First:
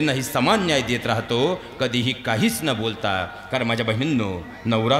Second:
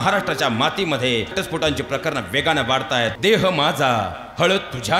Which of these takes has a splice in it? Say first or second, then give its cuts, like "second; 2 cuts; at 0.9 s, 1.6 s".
second; 2 cuts; at 1.3 s, 3.2 s